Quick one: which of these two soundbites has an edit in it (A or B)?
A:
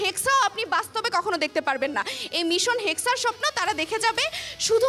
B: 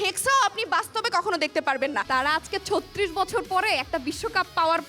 B